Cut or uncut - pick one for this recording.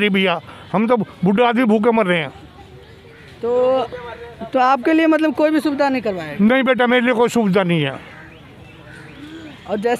uncut